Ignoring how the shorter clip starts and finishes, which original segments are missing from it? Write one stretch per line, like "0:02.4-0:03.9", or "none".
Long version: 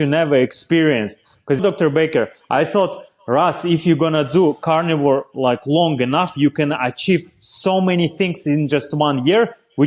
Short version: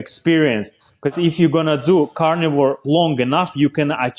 0:01.6-0:03.6
0:05.3-0:05.6